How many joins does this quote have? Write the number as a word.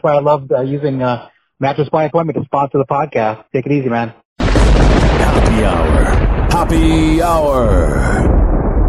zero